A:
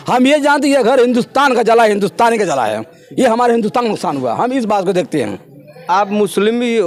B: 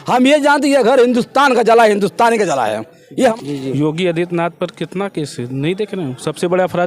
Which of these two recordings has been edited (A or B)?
B